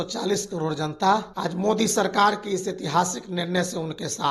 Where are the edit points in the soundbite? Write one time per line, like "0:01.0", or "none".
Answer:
0:01.3